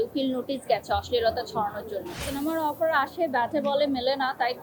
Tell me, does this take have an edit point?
yes; 1 cut; at 2.2 s

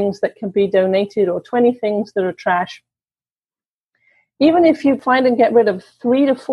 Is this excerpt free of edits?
no; 1 cut; at 5.0 s

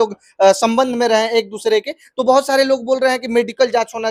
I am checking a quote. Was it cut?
no; 0 cuts

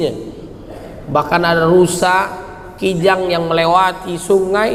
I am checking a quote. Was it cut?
no; 0 cuts

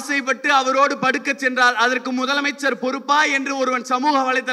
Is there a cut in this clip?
no; 0 cuts

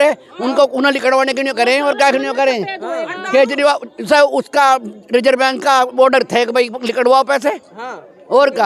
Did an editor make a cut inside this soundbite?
no; 0 cuts

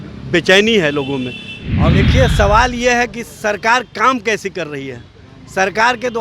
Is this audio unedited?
no; 1 cut; at 1.8 s

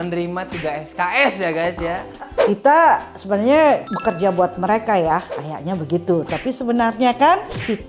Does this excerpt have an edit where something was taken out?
yes; 1 cut; at 2.3 s

